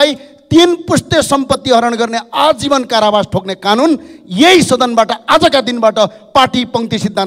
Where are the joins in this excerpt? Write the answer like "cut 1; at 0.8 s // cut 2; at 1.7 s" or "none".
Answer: none